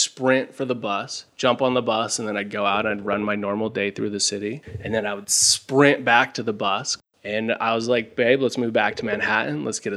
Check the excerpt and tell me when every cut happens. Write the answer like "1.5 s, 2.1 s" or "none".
7.0 s